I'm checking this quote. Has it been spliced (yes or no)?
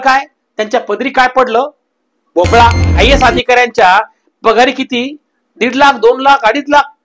yes